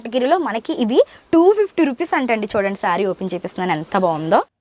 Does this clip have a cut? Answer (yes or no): no